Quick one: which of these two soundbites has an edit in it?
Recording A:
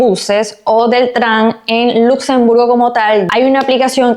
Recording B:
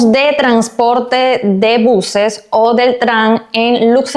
A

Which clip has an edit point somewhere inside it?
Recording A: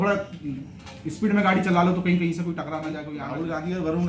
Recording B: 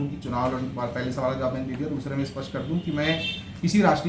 A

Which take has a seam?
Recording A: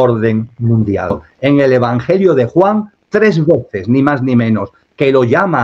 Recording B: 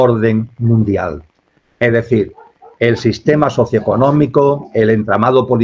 A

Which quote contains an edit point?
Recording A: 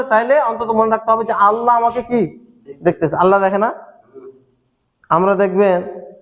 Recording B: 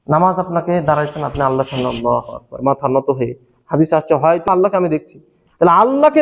B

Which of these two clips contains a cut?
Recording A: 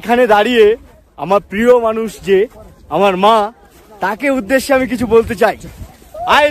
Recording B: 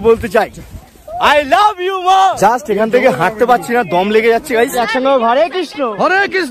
B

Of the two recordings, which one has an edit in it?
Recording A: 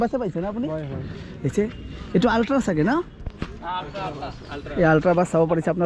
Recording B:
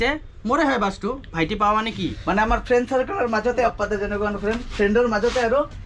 B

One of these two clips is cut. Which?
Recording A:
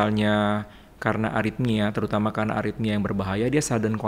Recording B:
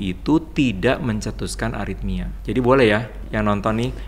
B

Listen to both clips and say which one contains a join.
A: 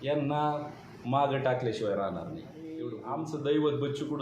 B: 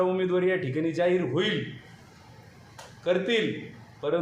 A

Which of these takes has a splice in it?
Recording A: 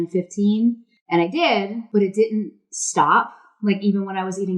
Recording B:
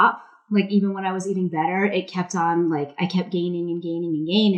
A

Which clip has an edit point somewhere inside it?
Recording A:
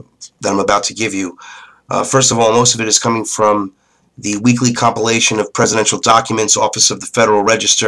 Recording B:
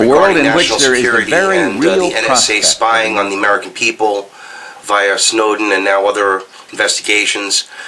B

